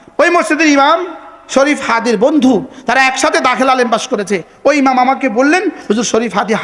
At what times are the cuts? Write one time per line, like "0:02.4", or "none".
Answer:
none